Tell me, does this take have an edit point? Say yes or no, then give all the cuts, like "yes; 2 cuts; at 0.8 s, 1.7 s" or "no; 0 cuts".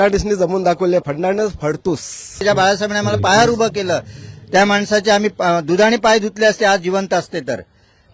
yes; 1 cut; at 2.4 s